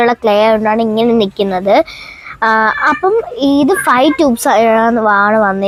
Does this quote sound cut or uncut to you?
uncut